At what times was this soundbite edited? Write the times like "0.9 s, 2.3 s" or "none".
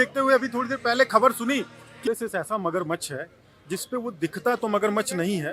1.9 s

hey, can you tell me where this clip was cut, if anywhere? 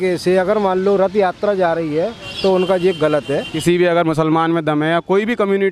3.5 s

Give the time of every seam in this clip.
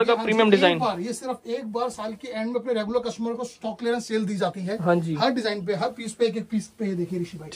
none

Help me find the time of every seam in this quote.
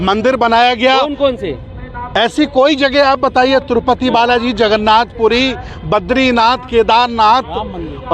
none

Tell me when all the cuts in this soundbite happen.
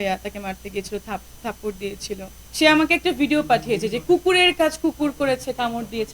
2.4 s

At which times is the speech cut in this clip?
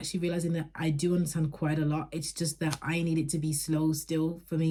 none

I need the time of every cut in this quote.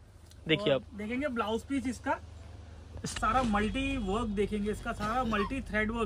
3.1 s

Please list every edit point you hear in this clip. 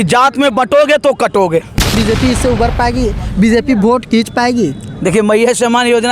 1.9 s

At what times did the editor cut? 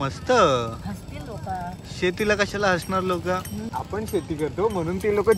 3.7 s

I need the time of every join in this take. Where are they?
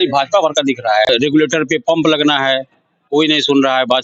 1.1 s

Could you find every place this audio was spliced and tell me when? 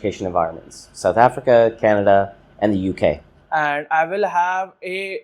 3.3 s

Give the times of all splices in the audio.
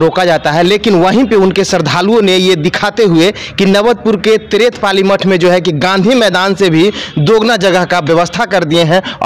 none

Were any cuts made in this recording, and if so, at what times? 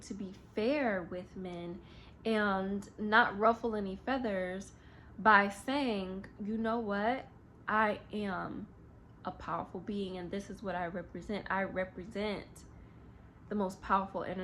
none

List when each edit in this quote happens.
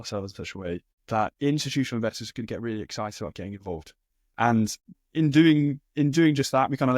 1.3 s, 5.0 s

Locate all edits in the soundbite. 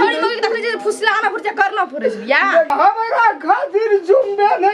2.7 s

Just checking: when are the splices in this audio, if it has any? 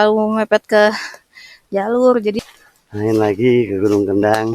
2.4 s

